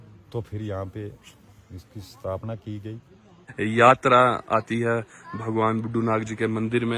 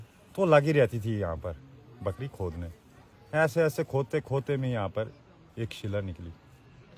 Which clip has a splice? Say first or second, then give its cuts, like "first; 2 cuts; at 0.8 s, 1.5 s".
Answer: first; 1 cut; at 3.4 s